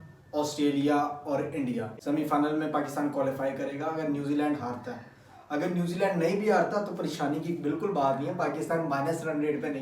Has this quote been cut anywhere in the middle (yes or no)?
yes